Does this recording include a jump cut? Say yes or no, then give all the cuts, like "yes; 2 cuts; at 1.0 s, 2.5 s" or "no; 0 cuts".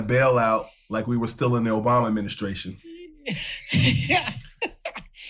no; 0 cuts